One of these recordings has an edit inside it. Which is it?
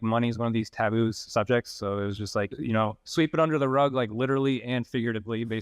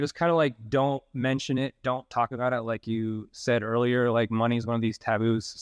first; 1 cut; at 2.6 s

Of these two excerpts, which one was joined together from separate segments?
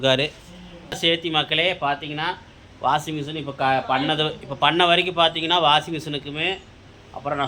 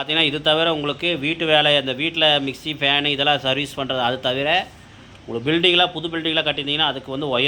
first; 1 cut; at 1.0 s

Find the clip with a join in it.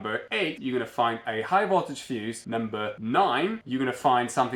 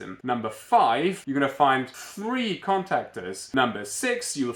second; 3 cuts; at 1.2 s, 2.0 s, 3.4 s

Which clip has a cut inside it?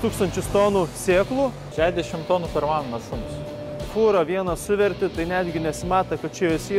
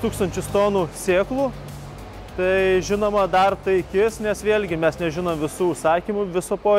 first; 2 cuts; at 1.6 s, 3.6 s

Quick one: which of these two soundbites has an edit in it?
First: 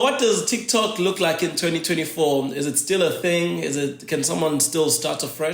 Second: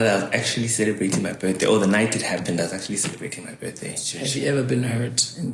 second; 1 cut; at 4.1 s

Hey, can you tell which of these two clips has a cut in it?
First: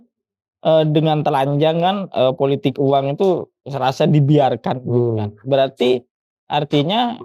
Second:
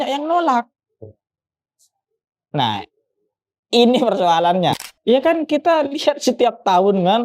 second; 1 cut; at 4.7 s

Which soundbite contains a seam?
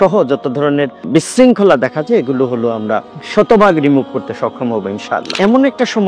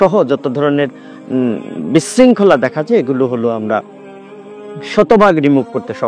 first; 3 cuts; at 1.3 s, 3.5 s, 5.2 s

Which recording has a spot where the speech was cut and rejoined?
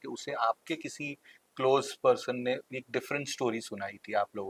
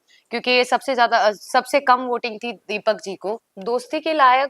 second; 1 cut; at 3.5 s

